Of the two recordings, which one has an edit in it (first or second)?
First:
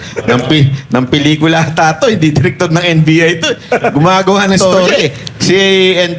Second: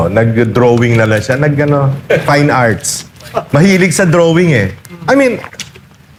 first